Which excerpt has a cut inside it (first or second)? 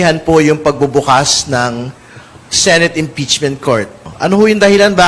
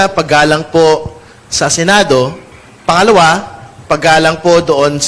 first